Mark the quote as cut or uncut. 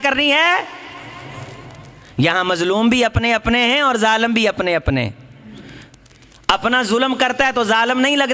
uncut